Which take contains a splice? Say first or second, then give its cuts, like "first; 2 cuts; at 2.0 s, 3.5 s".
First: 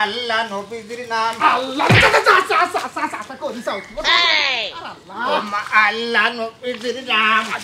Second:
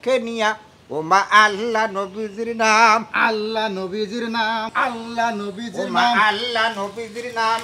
second; 1 cut; at 4.7 s